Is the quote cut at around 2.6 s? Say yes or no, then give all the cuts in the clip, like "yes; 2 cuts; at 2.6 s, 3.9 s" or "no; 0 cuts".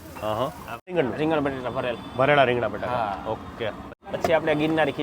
no; 2 cuts; at 0.9 s, 3.9 s